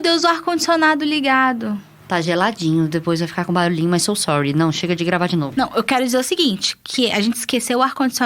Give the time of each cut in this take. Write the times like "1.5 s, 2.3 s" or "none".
1.9 s, 5.5 s